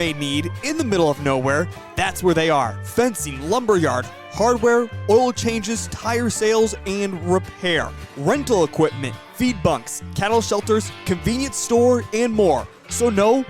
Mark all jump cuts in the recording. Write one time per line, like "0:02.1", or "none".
0:06.6